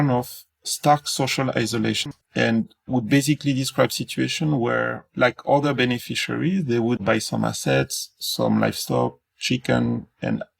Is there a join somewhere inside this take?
yes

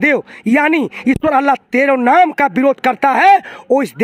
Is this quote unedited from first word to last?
yes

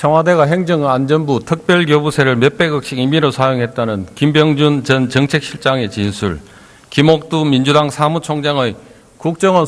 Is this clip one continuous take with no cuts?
no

